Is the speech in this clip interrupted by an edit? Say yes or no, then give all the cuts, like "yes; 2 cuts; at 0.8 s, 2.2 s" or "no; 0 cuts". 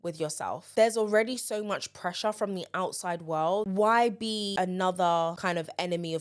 yes; 1 cut; at 3.7 s